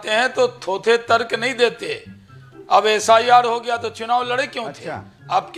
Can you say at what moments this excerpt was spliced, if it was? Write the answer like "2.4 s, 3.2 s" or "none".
none